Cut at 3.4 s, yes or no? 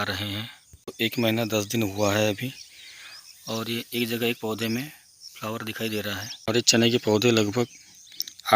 no